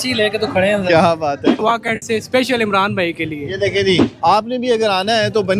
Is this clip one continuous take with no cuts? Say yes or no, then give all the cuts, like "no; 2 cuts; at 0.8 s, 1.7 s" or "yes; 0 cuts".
no; 2 cuts; at 1.6 s, 4.1 s